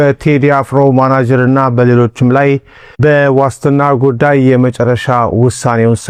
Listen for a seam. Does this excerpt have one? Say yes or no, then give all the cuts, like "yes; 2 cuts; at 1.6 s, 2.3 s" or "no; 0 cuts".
no; 0 cuts